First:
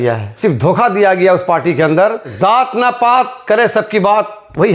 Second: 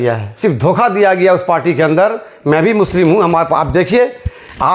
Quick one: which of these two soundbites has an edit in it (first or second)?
first